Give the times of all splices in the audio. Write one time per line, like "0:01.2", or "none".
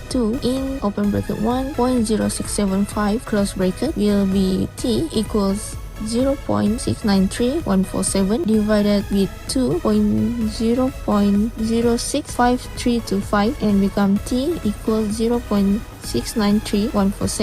none